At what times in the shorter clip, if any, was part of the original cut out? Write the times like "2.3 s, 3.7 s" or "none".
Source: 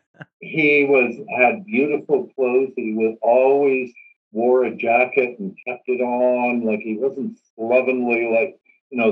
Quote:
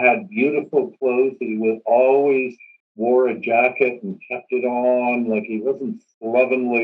none

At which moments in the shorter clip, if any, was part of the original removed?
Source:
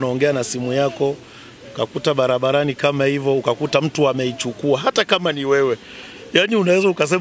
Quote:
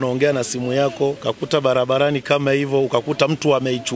1.2 s

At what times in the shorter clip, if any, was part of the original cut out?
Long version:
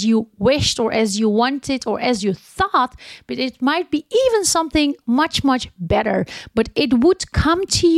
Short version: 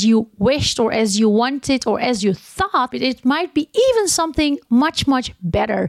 2.9 s

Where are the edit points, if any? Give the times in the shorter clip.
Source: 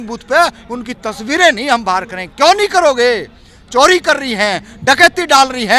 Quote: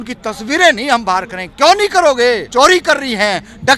2.4 s

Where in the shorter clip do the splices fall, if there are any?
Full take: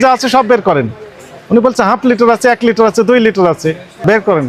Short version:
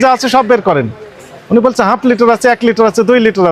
none

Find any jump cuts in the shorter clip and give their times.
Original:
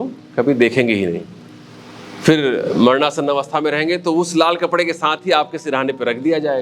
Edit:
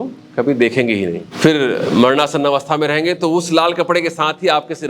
1.2 s

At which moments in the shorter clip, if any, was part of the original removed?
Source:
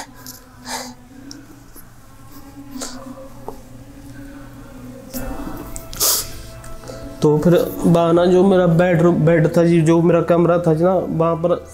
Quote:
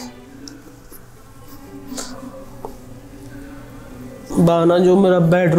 4.3 s

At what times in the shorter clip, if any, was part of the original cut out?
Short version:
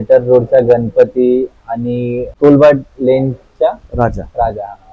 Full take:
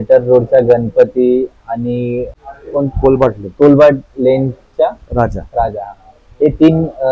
2.3 s

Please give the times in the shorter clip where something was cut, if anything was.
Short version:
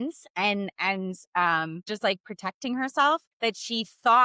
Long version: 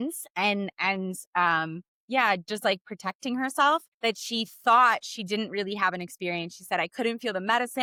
1.9 s

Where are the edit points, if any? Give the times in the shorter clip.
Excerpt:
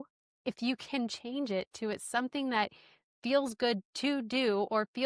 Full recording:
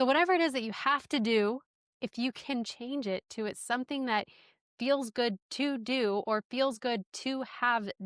none

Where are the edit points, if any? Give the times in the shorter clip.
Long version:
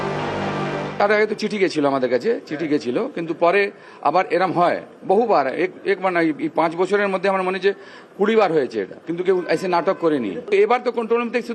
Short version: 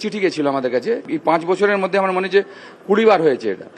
1.1 s

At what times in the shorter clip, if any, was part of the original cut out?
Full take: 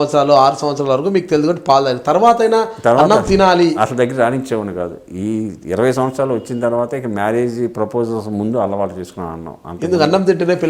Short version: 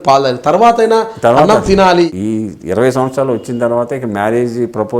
2.1 s

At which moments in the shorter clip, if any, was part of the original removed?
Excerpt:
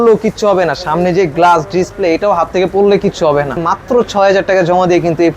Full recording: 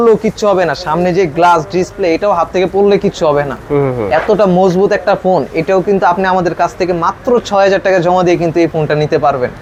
3.6 s

